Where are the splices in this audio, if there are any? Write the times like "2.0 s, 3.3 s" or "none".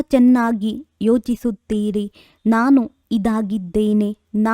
3.2 s